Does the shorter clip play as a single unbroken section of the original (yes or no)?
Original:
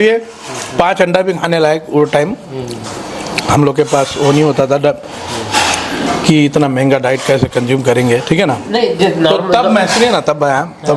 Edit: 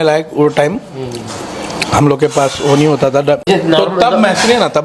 no